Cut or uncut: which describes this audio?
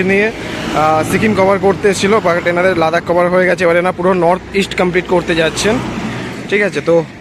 uncut